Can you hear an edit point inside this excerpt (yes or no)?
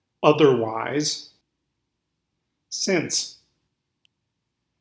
yes